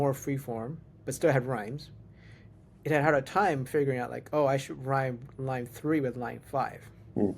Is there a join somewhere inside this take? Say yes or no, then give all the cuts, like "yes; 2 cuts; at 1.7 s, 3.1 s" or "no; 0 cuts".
no; 0 cuts